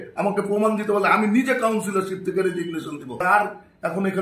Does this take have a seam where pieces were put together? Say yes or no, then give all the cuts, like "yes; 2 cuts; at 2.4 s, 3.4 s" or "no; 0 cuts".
yes; 1 cut; at 3.2 s